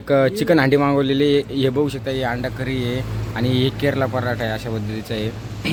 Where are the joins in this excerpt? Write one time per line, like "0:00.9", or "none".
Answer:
none

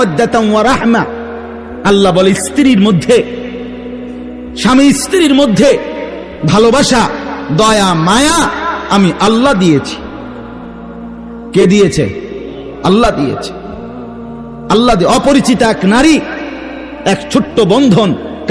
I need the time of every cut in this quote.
0:03.3
0:04.6

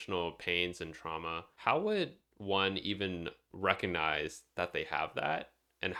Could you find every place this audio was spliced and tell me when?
none

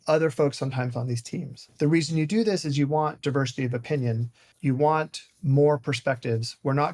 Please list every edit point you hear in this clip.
0:01.6
0:04.4

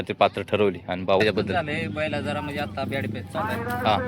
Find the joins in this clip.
0:01.2

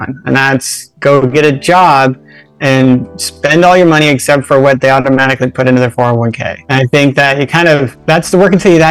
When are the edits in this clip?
0:06.5
0:07.9

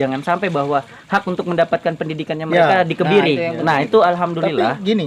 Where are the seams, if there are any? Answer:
none

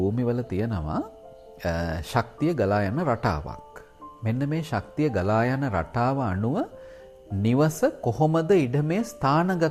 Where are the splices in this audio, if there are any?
none

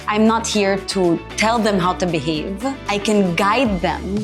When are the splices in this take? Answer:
0:01.3
0:02.8

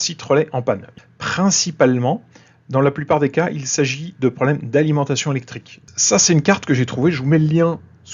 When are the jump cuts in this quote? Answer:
0:00.9
0:05.9

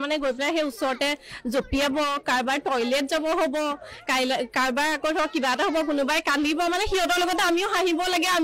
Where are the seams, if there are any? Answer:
none

